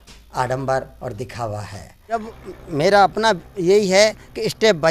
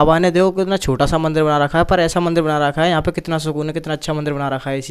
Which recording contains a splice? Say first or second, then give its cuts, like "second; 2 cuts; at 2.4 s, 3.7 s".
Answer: first; 1 cut; at 2.2 s